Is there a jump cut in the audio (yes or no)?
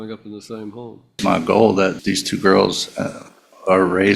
yes